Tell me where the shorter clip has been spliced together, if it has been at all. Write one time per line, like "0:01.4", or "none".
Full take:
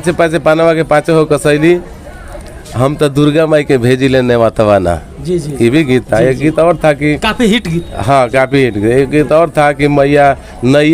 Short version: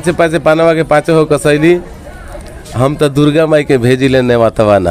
none